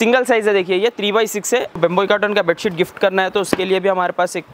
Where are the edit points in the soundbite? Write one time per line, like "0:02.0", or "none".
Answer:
0:01.8